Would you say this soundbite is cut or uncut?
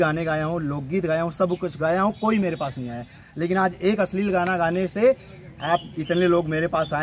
uncut